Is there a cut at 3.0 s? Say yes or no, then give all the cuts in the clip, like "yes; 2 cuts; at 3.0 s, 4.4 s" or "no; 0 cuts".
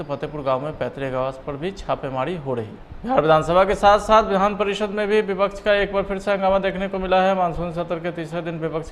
yes; 1 cut; at 3.0 s